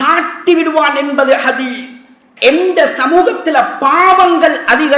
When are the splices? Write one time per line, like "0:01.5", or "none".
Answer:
0:02.2